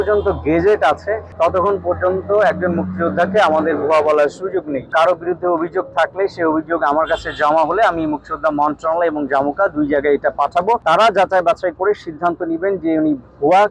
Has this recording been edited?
yes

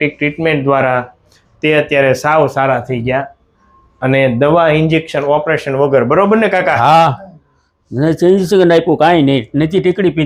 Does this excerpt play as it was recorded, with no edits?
yes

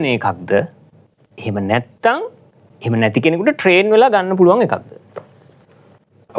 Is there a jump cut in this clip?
no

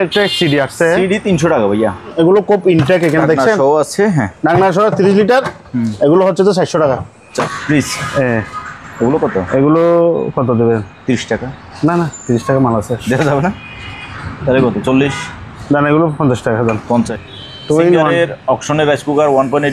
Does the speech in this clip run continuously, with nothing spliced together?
no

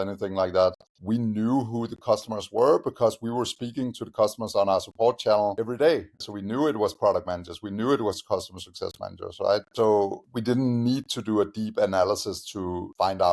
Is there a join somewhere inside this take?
yes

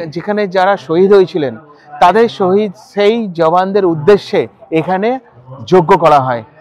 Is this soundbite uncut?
yes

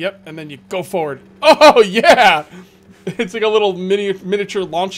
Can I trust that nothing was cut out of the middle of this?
yes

